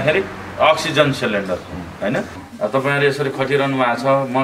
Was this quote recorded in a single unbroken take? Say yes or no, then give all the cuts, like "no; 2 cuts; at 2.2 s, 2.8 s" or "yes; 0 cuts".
no; 1 cut; at 2.4 s